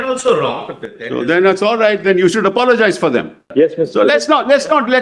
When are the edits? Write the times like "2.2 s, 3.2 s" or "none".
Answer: 3.4 s